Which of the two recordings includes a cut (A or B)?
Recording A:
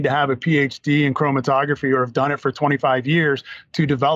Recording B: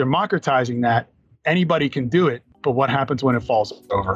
B